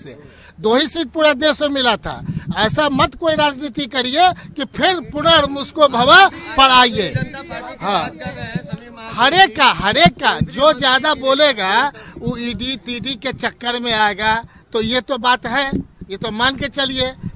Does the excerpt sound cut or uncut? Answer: uncut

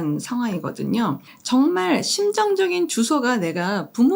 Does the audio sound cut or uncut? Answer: cut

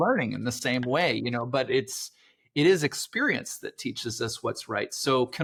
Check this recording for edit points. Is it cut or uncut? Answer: uncut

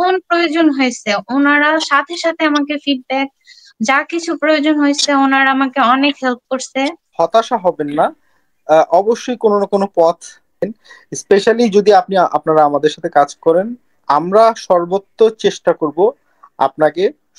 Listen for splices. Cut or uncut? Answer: cut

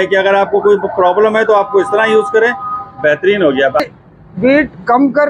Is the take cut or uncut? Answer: cut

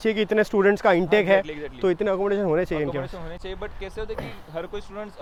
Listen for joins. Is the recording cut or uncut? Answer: uncut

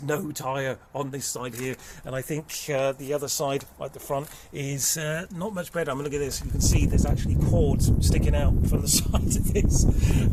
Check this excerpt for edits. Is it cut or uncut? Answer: uncut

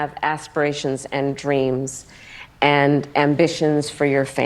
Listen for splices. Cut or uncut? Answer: uncut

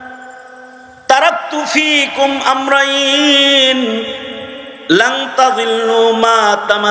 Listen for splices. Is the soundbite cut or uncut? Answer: uncut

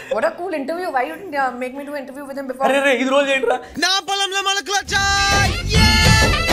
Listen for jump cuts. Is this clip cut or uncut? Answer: uncut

